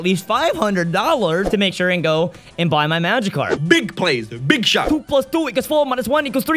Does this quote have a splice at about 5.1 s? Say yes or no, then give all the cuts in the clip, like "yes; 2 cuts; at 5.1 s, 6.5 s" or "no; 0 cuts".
yes; 3 cuts; at 1.5 s, 3.6 s, 5.1 s